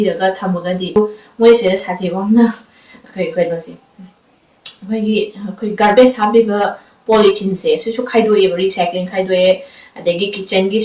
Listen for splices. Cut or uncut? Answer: cut